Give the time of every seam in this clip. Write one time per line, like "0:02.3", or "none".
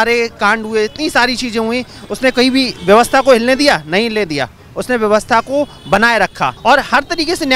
0:06.6

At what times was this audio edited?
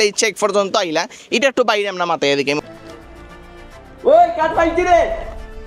0:02.6

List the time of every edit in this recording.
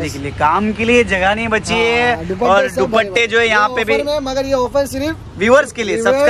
none

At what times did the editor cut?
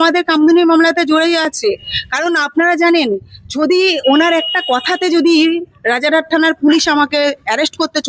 none

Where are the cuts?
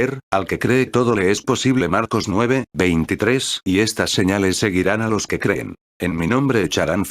0:03.2
0:05.4

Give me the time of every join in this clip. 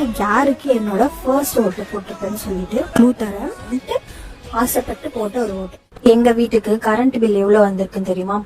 0:03.6
0:05.9

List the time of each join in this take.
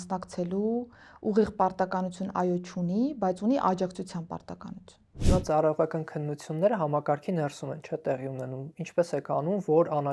0:05.2

